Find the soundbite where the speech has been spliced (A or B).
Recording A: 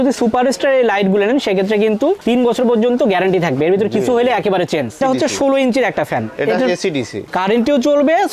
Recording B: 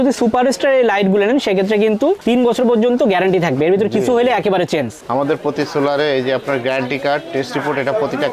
A